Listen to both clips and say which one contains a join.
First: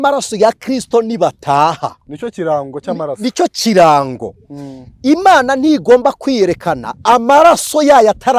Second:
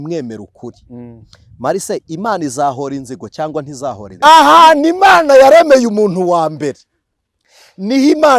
second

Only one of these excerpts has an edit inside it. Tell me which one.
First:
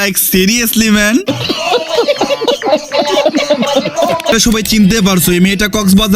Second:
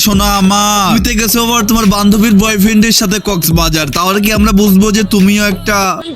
first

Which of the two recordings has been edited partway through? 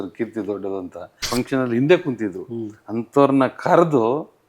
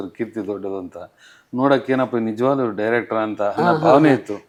first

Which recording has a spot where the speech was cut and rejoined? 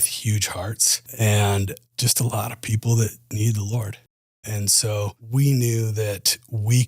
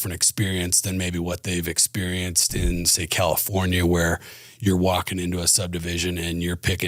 first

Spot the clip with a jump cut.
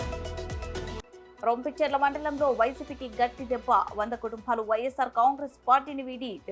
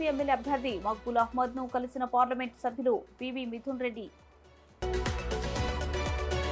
first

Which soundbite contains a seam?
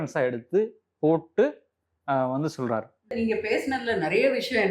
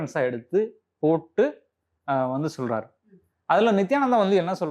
first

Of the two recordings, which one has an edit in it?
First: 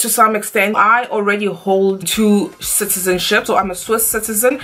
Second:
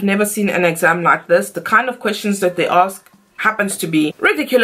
first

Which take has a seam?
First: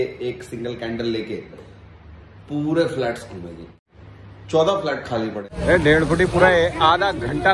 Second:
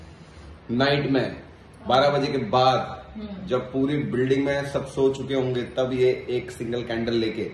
first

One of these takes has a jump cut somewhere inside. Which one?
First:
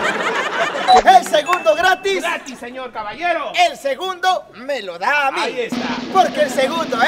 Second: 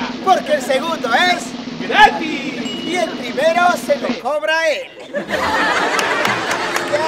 first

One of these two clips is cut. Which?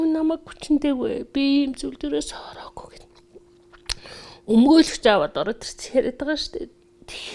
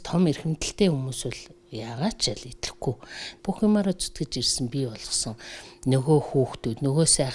second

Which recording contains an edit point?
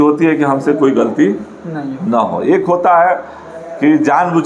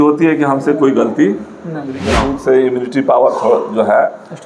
second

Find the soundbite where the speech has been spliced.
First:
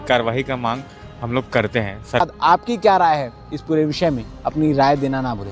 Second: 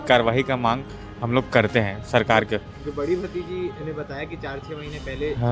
first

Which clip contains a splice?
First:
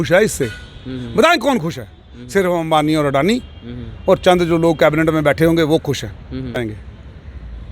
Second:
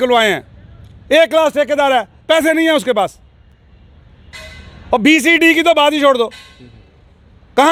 first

